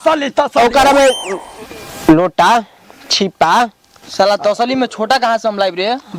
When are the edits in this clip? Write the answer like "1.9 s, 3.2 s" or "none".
none